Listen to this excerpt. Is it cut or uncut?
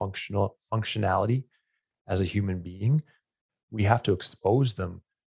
uncut